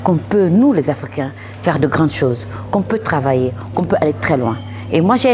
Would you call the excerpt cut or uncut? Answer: uncut